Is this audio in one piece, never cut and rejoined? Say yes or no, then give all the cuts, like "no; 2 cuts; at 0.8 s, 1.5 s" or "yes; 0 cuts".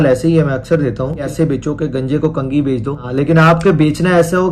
no; 2 cuts; at 1.3 s, 3.1 s